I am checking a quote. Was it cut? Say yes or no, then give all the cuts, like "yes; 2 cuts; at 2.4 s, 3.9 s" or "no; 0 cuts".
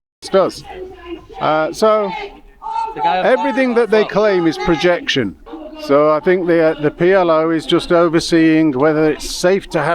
yes; 1 cut; at 5.4 s